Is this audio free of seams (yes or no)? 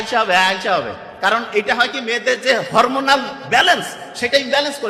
yes